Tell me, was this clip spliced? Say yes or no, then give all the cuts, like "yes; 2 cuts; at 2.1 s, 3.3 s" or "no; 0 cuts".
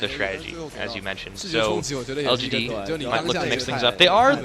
yes; 1 cut; at 2.0 s